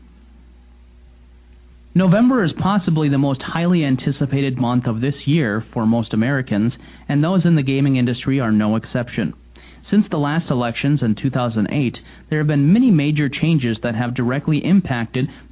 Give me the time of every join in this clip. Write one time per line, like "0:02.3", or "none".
0:13.3